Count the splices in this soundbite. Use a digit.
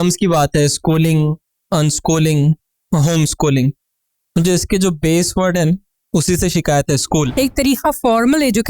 1